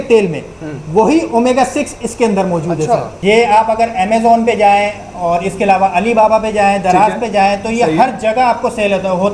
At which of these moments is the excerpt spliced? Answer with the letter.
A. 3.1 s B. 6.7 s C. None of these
A